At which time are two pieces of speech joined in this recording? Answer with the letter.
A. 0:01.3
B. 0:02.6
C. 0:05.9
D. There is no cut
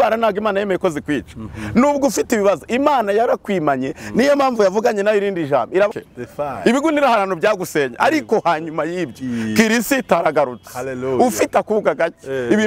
C